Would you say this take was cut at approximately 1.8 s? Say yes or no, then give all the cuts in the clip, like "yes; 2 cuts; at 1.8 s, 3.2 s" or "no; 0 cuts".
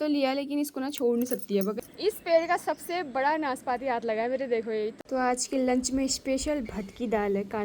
yes; 2 cuts; at 1.8 s, 5.0 s